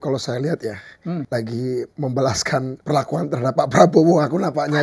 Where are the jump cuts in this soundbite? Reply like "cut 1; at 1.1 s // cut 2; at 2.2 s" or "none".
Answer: cut 1; at 1.3 s // cut 2; at 1.9 s // cut 3; at 2.7 s